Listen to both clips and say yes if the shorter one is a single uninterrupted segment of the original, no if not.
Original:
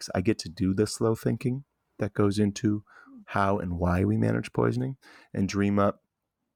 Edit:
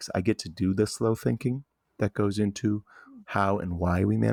yes